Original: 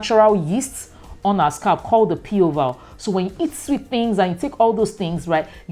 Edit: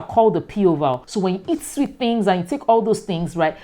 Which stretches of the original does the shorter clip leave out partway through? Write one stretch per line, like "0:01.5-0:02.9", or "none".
0:02.8-0:03.0